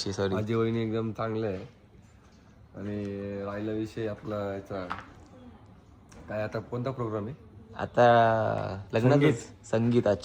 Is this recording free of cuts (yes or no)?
yes